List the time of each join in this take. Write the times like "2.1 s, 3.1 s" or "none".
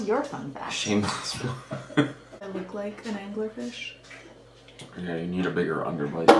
2.5 s

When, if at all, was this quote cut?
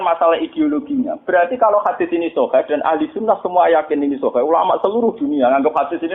none

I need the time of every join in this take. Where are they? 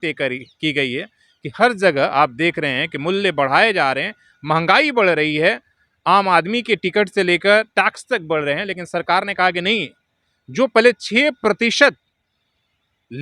none

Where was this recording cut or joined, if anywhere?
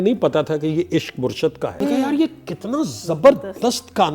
1.8 s

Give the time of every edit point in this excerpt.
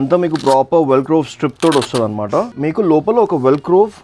2.5 s

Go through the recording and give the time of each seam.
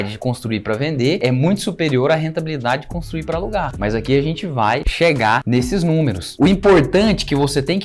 1.2 s

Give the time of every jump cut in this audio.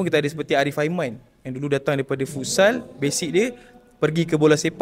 none

